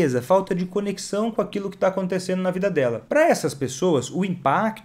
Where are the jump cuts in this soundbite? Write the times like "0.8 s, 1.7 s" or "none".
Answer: 3.0 s